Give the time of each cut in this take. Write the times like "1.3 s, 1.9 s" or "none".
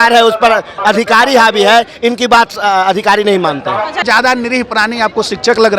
4.0 s

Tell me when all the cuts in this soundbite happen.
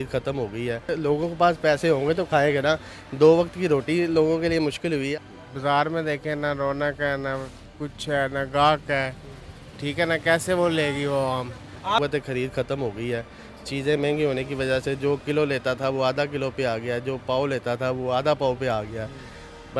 0.9 s, 5.2 s, 12.0 s

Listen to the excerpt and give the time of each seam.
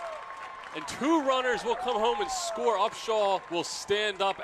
3.5 s

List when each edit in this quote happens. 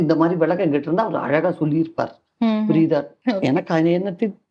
3.1 s

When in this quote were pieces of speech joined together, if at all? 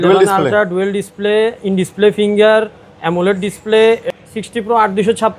4.1 s

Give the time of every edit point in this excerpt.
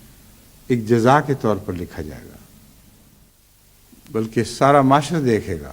3.3 s

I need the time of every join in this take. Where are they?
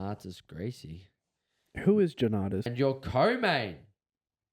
2.7 s

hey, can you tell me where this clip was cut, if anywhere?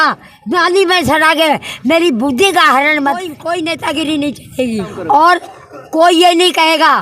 3.3 s, 4.9 s

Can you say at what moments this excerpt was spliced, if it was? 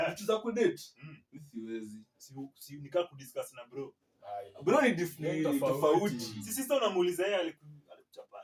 none

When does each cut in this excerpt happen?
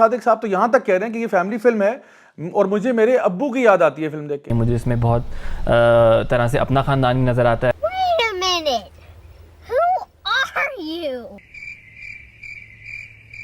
4.5 s, 11.4 s

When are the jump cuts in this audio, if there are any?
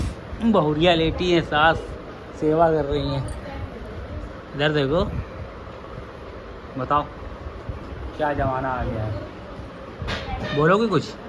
none

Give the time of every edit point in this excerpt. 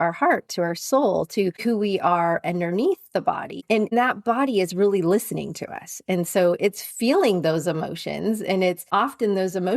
1.6 s, 3.6 s, 8.9 s

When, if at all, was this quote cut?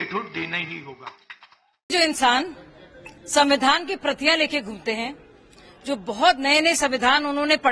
none

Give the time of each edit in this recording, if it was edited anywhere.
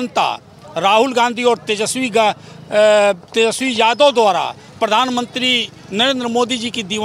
none

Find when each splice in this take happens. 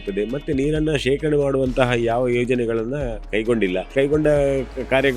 3.9 s

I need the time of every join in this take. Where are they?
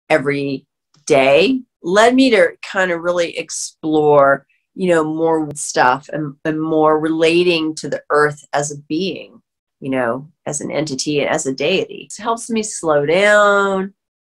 1.7 s, 5.5 s, 12.1 s

